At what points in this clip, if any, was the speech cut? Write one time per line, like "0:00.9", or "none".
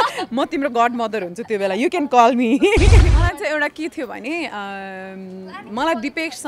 0:03.1